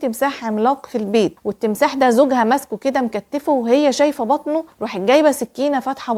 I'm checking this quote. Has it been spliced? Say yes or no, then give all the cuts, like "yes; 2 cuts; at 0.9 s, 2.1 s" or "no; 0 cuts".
no; 0 cuts